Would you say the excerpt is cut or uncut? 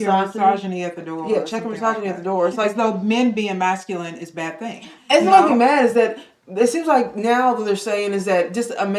cut